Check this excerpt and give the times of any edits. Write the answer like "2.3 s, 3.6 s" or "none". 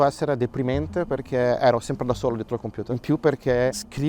none